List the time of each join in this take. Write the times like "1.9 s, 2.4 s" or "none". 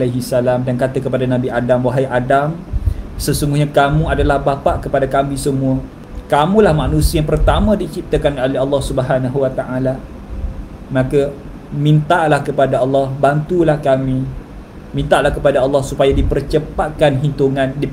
none

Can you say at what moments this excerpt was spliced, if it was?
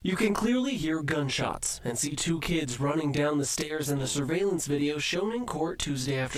none

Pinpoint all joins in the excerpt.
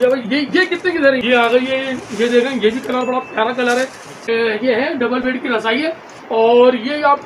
1.2 s, 4.2 s

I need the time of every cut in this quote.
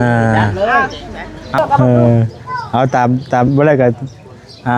1.6 s

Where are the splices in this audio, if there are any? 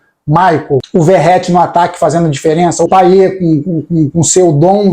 0.9 s, 2.9 s

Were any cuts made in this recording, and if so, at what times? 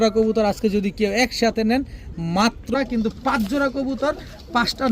2.7 s

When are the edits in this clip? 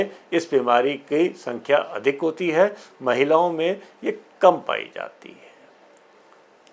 none

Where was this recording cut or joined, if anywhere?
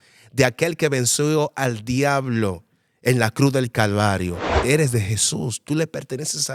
4.5 s

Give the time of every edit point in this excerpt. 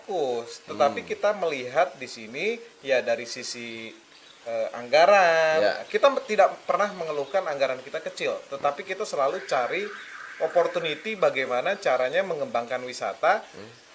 none

